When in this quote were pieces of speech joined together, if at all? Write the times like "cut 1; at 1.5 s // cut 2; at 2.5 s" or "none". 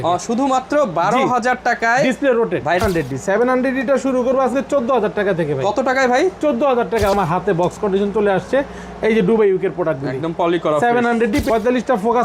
cut 1; at 2.8 s // cut 2; at 7.1 s // cut 3; at 11.4 s